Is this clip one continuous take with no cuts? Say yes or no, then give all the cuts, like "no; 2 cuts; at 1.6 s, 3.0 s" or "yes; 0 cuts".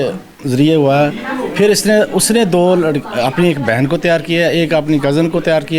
yes; 0 cuts